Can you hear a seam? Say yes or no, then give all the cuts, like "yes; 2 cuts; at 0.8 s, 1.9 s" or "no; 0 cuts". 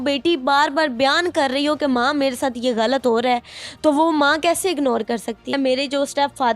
yes; 1 cut; at 5.5 s